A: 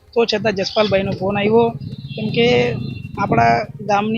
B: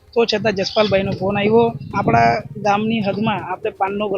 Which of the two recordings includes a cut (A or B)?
B